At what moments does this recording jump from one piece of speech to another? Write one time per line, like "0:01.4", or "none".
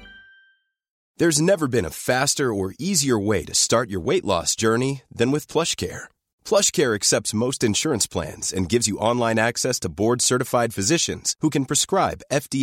0:01.0